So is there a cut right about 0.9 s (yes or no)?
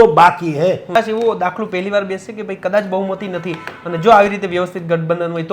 yes